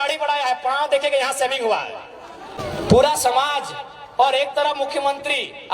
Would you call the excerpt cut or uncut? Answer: cut